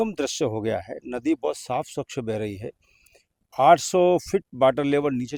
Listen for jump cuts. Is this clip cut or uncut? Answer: uncut